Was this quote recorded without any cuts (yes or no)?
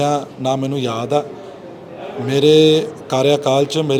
yes